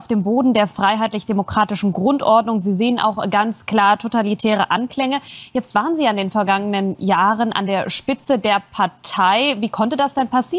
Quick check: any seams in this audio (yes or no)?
no